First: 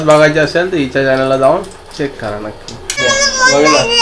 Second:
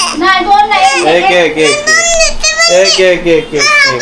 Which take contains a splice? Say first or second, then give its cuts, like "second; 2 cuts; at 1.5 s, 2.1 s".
first; 1 cut; at 3.0 s